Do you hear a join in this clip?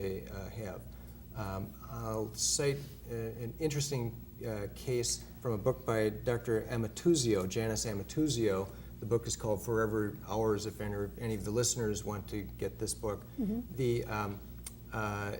yes; 1 cut; at 2.0 s

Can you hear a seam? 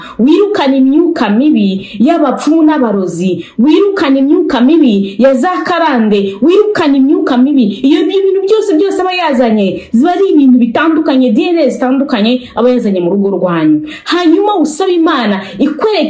no; 0 cuts

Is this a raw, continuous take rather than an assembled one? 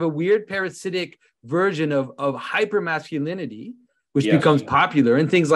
yes; 0 cuts

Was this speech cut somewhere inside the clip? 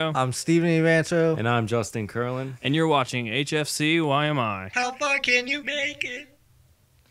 yes; 1 cut; at 1.9 s

